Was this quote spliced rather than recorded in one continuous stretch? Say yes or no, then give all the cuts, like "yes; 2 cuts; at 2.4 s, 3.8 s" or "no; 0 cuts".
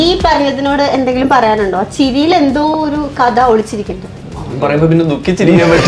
no; 0 cuts